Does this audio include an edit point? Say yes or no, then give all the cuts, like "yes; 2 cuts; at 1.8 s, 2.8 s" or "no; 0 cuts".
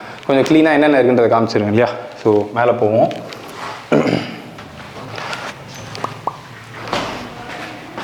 no; 0 cuts